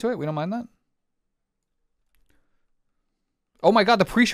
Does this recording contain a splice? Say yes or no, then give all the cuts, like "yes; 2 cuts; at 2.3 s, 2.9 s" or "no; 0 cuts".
no; 0 cuts